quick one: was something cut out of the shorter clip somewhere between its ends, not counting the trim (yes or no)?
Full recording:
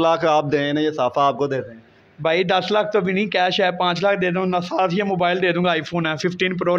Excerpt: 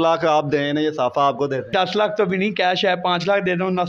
yes